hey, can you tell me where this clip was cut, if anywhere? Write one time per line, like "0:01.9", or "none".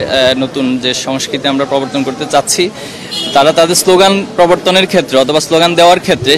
none